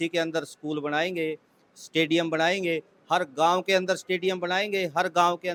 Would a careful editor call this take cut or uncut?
uncut